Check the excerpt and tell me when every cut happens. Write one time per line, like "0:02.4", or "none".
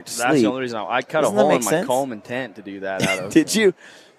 none